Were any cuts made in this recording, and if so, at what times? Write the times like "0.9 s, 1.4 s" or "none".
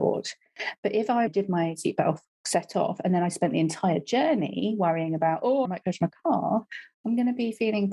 1.3 s, 5.7 s